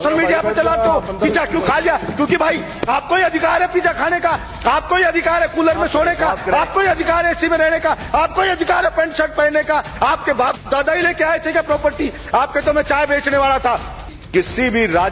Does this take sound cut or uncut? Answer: cut